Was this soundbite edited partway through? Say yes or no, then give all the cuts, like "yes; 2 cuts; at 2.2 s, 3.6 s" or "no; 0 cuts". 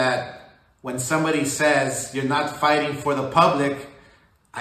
no; 0 cuts